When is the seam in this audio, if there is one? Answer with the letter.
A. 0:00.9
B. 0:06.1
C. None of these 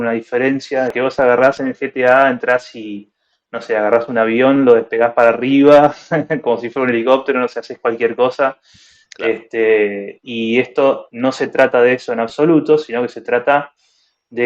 A